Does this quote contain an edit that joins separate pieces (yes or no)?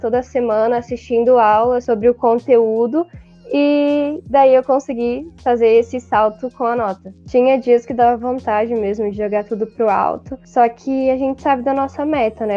yes